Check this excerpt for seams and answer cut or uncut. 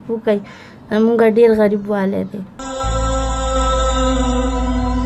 cut